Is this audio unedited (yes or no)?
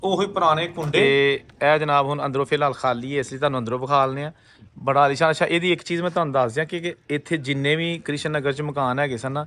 no